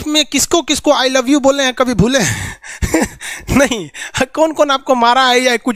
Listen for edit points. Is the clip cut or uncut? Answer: uncut